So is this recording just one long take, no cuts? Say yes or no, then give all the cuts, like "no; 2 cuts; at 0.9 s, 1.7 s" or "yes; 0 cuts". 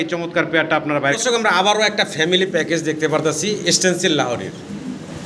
no; 1 cut; at 1.2 s